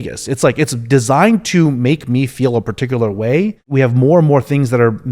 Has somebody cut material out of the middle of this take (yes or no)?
yes